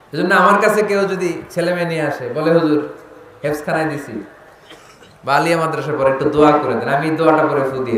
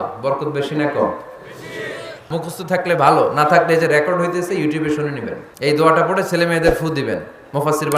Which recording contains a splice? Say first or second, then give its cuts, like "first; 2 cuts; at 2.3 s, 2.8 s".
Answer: second; 2 cuts; at 2.2 s, 5.4 s